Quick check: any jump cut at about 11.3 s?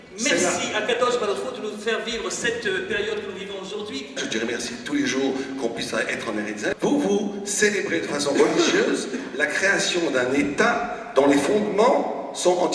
no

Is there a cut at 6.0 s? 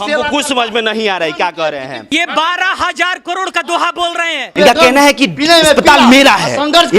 no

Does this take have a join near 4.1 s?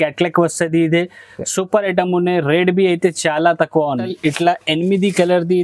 yes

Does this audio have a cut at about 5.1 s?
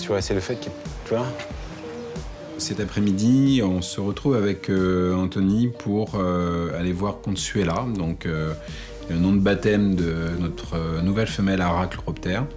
no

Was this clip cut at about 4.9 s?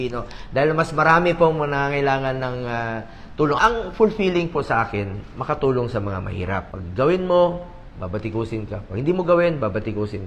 no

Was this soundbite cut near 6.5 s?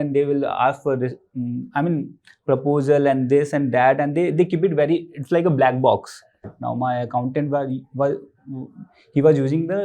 yes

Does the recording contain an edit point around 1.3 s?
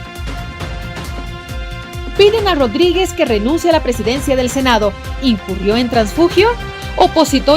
yes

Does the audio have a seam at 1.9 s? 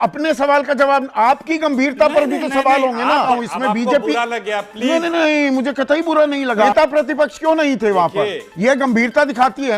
no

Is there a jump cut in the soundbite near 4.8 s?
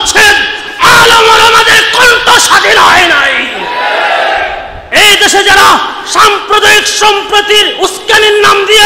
yes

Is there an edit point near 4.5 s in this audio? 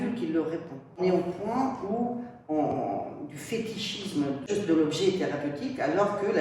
yes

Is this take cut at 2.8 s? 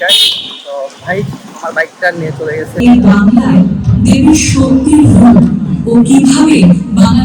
yes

